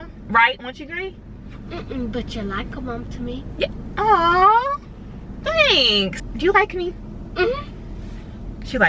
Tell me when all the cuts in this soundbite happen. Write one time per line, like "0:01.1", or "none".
0:06.3